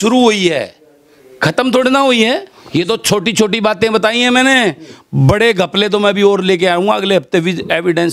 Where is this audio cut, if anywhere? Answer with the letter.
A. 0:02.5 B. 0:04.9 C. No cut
A